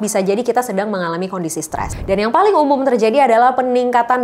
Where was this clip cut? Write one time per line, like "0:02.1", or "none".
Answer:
0:01.9